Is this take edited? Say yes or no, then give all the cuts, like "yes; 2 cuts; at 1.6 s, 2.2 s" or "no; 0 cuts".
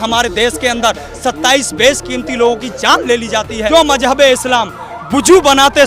yes; 1 cut; at 3.7 s